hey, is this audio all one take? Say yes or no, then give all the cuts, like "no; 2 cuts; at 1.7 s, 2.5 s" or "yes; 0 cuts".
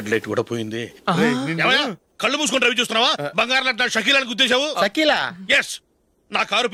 yes; 0 cuts